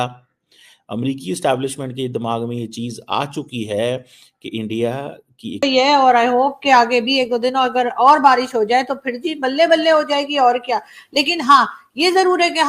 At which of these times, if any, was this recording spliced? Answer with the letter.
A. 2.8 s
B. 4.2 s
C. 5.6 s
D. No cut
C